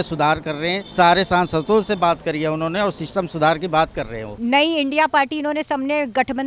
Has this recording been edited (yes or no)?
yes